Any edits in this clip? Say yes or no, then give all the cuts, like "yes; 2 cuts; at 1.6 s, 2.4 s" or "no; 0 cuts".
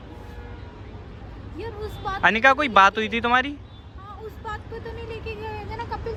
no; 0 cuts